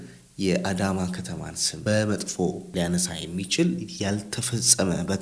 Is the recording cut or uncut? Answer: uncut